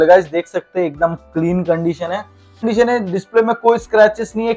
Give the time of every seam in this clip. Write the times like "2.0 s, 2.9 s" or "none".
2.6 s